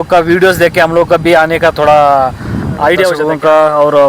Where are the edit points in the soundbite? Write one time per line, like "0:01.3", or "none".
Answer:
0:03.2